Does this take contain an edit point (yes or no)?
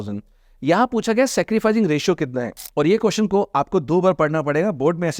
yes